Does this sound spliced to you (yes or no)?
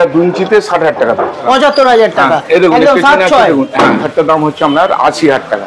yes